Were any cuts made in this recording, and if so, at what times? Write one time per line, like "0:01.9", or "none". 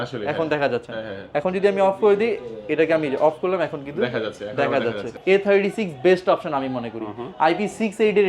0:05.1